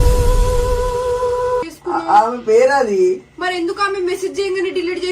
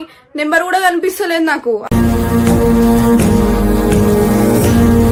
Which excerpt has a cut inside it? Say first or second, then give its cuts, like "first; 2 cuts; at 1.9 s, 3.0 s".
first; 1 cut; at 1.7 s